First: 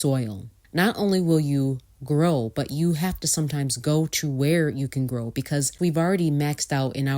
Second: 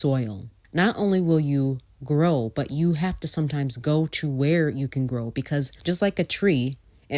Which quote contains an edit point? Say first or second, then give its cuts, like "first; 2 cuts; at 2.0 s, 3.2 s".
first; 1 cut; at 5.7 s